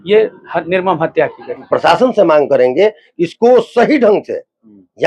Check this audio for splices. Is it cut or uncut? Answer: cut